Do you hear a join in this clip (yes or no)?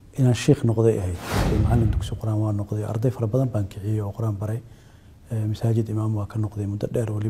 yes